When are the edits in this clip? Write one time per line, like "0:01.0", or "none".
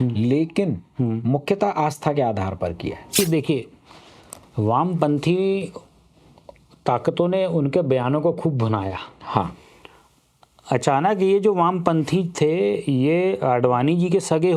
0:03.2